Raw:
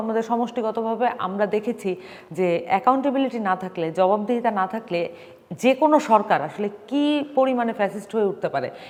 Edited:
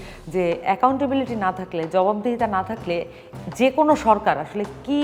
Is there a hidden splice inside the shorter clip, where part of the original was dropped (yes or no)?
no